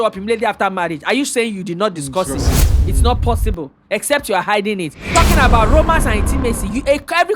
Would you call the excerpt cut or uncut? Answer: cut